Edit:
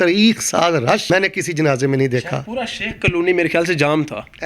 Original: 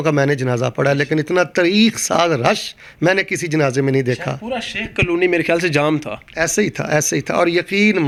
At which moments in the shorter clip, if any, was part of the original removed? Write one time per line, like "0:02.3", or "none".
0:01.0